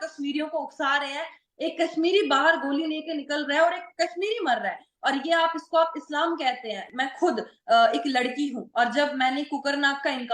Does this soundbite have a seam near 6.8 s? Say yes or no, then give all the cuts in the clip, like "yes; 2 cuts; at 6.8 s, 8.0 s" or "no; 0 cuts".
yes; 1 cut; at 6.8 s